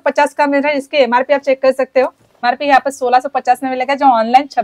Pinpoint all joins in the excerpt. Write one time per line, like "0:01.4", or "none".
0:02.3